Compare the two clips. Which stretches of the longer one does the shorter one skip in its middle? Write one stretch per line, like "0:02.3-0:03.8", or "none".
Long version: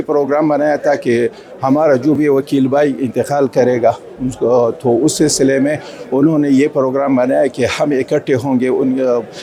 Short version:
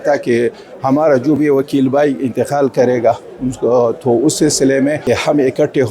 0:05.8-0:07.5